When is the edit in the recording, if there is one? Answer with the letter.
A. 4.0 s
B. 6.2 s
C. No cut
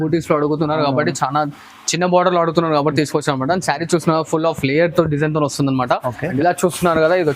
B